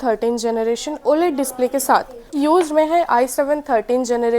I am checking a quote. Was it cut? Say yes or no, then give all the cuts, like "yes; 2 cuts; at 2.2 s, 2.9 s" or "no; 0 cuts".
yes; 1 cut; at 2.4 s